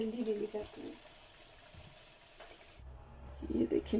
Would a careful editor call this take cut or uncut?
cut